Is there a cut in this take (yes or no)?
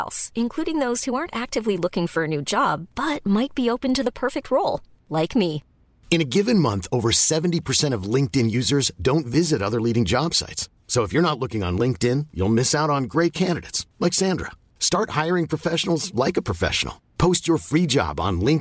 no